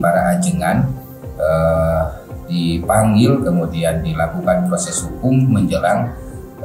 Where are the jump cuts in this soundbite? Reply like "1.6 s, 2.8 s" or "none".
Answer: none